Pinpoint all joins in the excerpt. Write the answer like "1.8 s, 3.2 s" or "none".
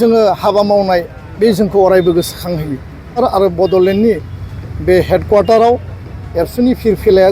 3.2 s